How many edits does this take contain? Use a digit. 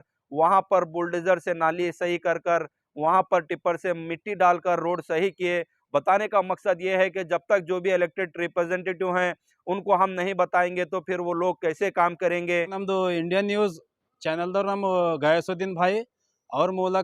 1